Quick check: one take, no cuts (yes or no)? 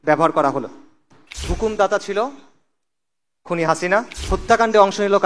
no